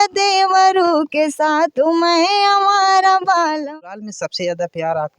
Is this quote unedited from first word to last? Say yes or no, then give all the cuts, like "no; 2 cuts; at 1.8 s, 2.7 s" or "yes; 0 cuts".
no; 1 cut; at 3.8 s